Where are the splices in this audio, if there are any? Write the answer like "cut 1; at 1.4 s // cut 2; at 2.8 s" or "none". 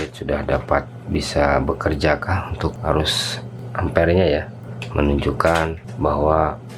cut 1; at 4.6 s